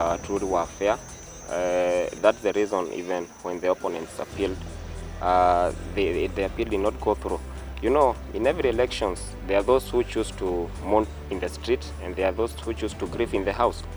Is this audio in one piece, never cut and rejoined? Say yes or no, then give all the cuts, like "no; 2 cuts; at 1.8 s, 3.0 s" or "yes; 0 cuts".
yes; 0 cuts